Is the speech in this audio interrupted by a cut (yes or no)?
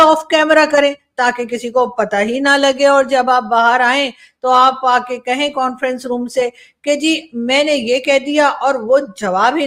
no